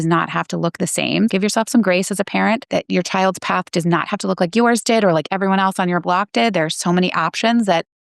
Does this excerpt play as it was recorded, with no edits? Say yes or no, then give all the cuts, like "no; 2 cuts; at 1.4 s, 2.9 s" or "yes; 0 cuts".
no; 2 cuts; at 1.3 s, 2.6 s